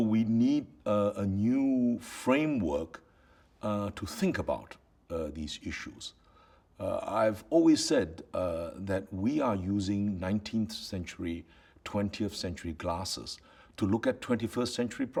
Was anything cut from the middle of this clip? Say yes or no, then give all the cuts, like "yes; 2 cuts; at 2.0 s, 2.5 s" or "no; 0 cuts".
no; 0 cuts